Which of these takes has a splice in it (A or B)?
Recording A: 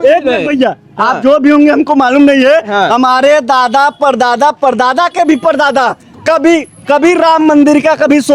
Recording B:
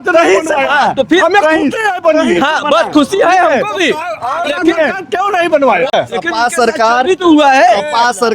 B